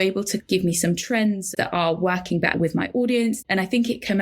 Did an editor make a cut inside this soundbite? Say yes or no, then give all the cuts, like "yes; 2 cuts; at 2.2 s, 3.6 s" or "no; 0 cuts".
yes; 2 cuts; at 1.5 s, 3.4 s